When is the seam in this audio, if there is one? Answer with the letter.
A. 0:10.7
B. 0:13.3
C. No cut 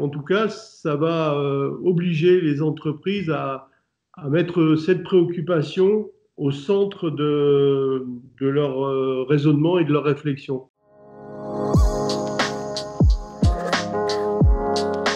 A